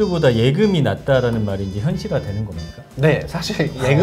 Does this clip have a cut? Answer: no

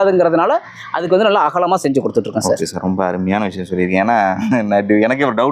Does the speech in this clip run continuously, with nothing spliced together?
yes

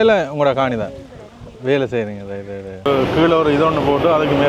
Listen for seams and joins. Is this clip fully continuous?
no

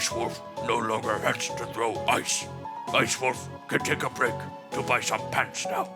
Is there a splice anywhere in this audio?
no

